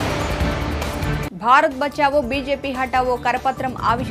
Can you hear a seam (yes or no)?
yes